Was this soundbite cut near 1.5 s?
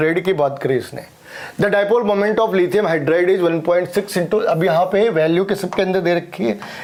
no; 0 cuts

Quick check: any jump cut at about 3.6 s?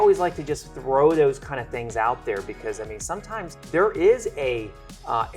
yes; 1 cut; at 3.6 s

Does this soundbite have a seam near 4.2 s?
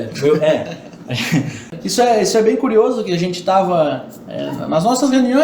no; 1 cut; at 1.7 s

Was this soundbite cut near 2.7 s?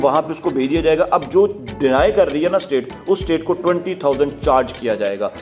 no; 0 cuts

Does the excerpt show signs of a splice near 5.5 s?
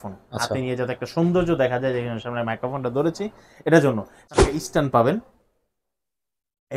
no; 1 cut; at 4.1 s

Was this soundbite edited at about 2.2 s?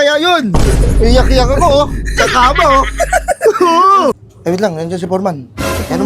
no; 1 cut; at 4.3 s

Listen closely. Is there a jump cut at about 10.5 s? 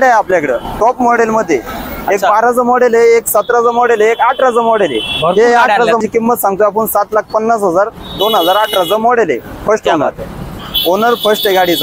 yes; 2 cuts; at 6.0 s, 10.5 s

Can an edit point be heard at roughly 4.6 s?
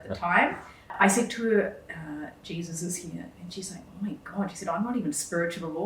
no; 1 cut; at 0.9 s

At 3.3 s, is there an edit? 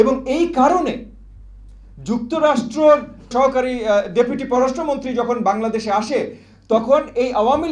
yes; 1 cut; at 3.3 s

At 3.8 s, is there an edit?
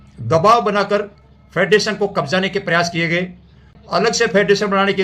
yes; 1 cut; at 3.8 s

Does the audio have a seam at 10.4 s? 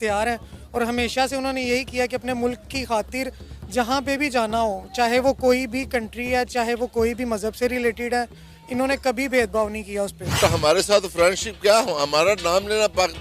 yes; 1 cut; at 10.4 s

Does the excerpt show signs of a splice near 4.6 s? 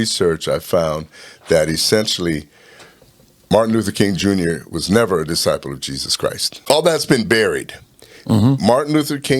no; 1 cut; at 6.5 s

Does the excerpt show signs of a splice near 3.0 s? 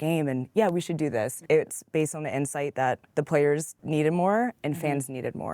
yes; 3 cuts; at 1.4 s, 3.0 s, 3.7 s

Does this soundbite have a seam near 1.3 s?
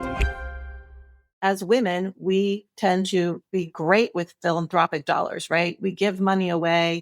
yes; 1 cut; at 1.3 s

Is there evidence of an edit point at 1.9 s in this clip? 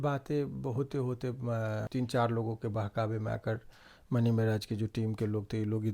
yes; 1 cut; at 1.9 s

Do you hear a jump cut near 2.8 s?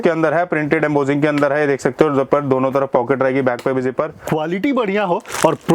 no; 1 cut; at 4.2 s

